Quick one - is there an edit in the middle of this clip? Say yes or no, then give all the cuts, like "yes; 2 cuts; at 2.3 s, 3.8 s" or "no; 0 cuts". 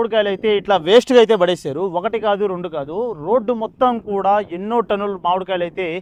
no; 0 cuts